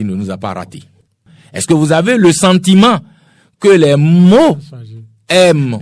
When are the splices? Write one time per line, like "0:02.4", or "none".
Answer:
0:01.2